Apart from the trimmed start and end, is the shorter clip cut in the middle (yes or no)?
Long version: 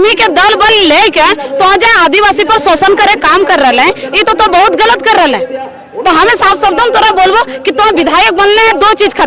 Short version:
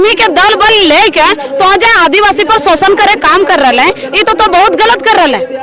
no